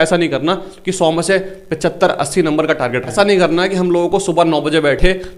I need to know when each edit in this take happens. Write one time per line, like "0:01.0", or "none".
0:03.1